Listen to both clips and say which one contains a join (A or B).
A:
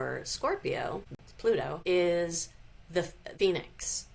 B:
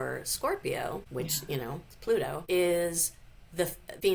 A